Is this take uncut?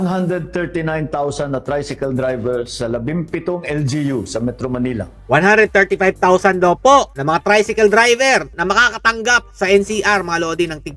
yes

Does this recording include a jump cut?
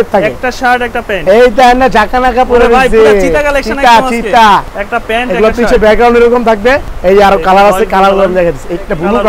yes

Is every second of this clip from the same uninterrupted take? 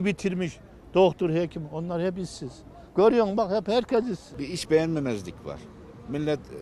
no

